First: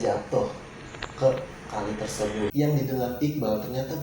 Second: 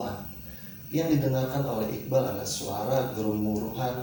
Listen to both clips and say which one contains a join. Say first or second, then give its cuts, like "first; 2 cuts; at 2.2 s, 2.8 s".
first; 1 cut; at 2.5 s